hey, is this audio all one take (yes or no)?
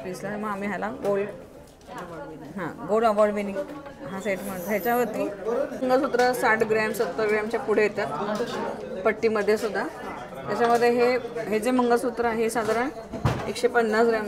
no